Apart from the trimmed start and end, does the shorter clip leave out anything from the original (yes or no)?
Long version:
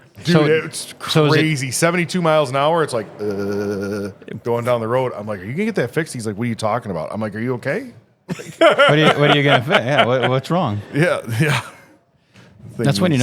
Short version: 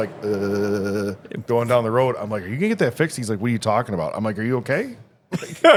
no